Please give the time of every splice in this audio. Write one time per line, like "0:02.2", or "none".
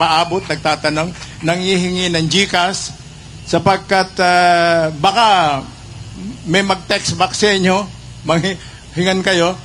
none

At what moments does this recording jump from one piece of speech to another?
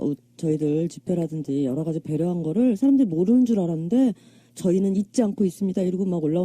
0:03.0

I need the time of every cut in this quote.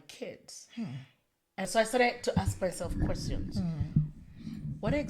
0:01.7

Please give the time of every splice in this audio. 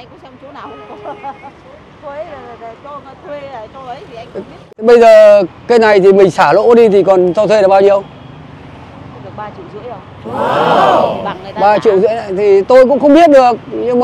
0:04.6

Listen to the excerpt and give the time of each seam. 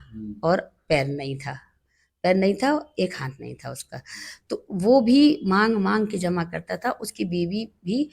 none

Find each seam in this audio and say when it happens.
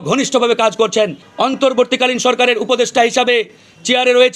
0:01.2

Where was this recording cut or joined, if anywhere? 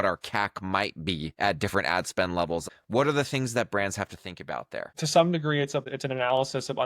0:01.3
0:02.6
0:04.9
0:05.9

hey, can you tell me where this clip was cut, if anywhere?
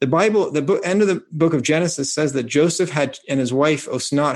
0:01.3

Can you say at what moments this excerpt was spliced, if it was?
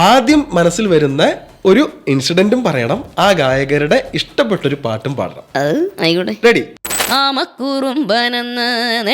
0:06.7

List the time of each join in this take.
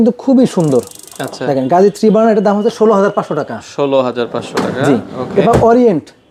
none

